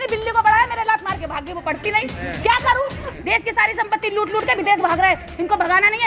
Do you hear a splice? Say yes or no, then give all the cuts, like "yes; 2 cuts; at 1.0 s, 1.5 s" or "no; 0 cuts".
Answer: yes; 1 cut; at 3.0 s